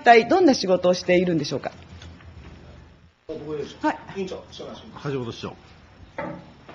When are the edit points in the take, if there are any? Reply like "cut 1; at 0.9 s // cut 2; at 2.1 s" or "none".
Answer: cut 1; at 5.0 s